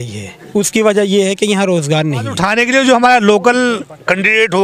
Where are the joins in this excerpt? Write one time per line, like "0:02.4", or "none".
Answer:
0:02.4